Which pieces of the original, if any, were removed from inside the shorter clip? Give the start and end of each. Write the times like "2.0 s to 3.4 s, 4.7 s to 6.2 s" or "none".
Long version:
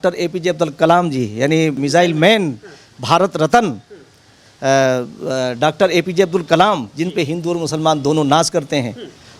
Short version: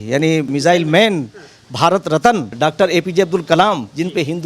3.8 s to 5.5 s